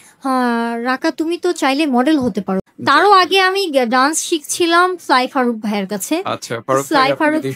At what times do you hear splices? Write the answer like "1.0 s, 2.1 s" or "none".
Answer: 2.7 s